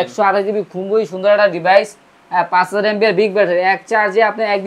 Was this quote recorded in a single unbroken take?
yes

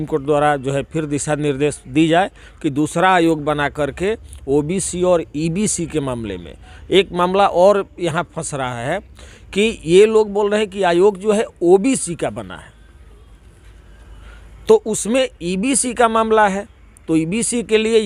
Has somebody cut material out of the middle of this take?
no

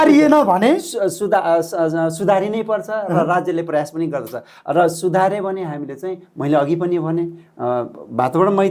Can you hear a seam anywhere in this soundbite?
no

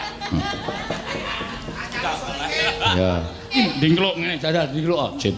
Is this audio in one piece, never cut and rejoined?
no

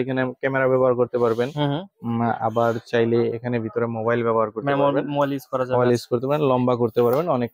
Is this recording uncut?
yes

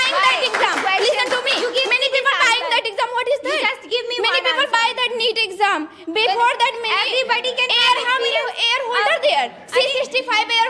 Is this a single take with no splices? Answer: yes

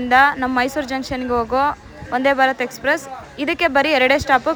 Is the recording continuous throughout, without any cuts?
yes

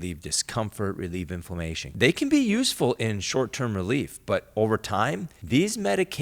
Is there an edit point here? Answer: yes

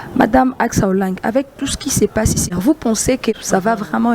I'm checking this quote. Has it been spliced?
yes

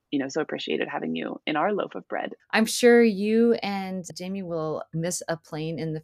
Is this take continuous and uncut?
no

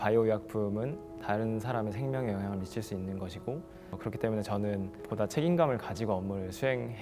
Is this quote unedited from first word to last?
no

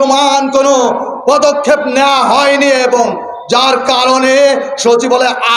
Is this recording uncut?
yes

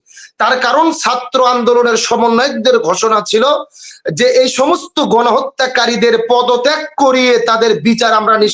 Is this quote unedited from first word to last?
yes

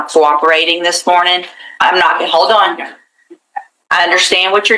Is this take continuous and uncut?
yes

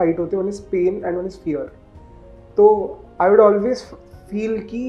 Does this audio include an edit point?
no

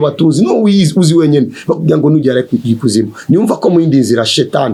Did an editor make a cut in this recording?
no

